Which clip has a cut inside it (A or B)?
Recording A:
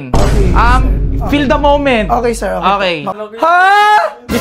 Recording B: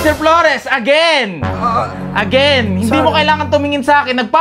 A